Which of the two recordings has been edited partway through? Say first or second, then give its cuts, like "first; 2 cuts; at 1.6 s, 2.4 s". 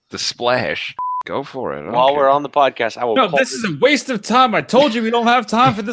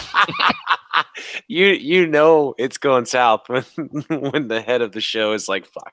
first; 1 cut; at 1.2 s